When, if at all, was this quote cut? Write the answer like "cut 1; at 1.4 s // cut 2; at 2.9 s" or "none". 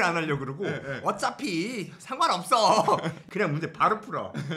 cut 1; at 3.2 s